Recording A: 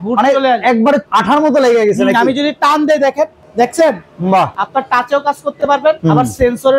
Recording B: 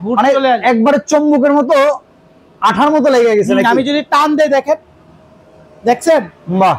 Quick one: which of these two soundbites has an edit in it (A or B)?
A